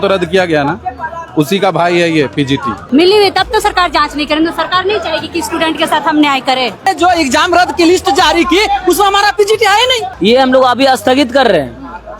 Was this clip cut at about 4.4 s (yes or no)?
no